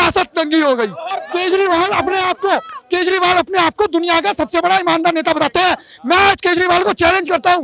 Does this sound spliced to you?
yes; 1 cut; at 1.2 s

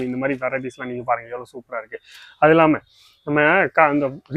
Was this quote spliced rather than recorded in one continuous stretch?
no; 0 cuts

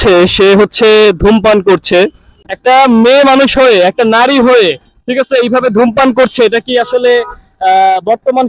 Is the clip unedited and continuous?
no; 1 cut; at 2.5 s

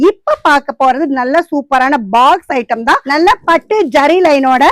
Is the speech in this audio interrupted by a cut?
yes; 1 cut; at 3.1 s

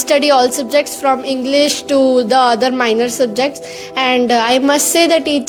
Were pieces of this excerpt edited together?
no; 0 cuts

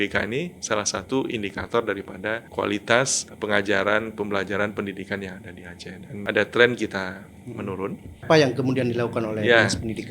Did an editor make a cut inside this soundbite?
yes; 4 cuts; at 2.4 s, 3.2 s, 6.2 s, 8.2 s

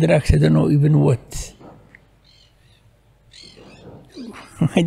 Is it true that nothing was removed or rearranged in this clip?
yes; 0 cuts

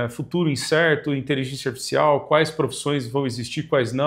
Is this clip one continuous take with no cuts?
yes; 0 cuts

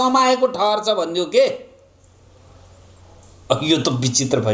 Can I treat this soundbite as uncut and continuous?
yes; 0 cuts

